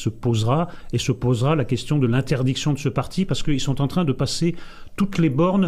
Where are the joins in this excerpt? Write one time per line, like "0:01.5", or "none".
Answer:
0:01.0